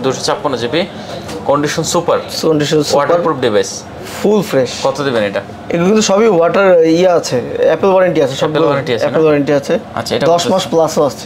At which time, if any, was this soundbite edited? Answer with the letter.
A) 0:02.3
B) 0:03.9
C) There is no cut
C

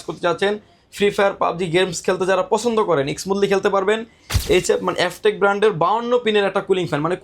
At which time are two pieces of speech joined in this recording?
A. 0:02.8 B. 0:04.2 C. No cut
B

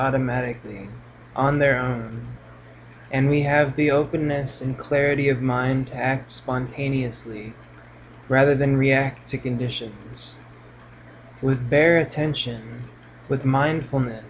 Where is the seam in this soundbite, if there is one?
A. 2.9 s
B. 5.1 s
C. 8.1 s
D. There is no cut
A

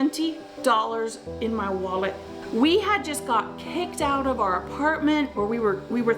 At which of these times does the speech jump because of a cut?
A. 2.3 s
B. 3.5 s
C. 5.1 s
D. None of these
A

